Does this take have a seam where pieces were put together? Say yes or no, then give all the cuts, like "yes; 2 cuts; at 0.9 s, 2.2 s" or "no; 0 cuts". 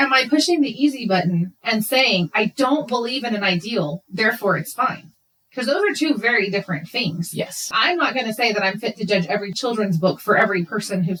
no; 0 cuts